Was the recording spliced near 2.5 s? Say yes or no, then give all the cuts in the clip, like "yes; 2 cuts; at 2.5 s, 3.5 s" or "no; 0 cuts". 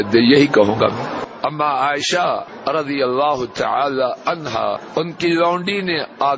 yes; 3 cuts; at 1.3 s, 2.5 s, 4.8 s